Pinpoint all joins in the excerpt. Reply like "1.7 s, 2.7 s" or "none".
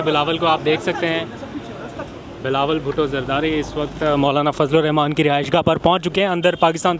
none